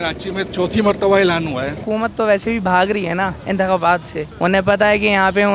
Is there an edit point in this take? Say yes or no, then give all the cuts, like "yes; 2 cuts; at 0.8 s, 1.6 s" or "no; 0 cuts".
yes; 3 cuts; at 1.8 s, 3.4 s, 4.2 s